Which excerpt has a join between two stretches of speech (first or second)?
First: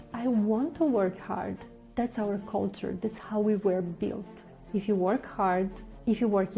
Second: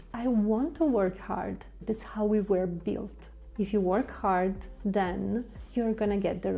second